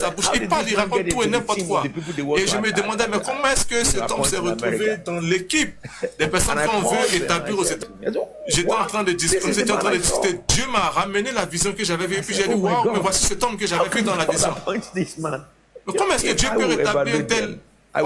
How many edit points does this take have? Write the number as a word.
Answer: one